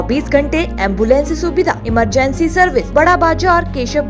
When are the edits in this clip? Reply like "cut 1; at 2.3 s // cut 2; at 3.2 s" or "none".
cut 1; at 2.9 s